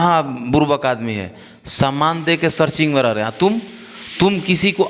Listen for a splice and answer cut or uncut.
uncut